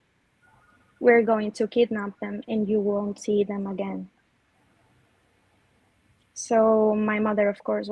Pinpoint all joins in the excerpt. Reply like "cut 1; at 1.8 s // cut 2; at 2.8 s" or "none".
none